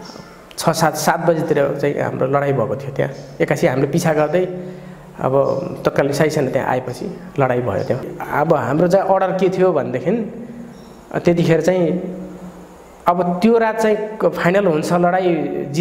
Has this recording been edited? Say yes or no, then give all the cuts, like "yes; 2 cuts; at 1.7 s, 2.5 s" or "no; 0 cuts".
yes; 1 cut; at 8.1 s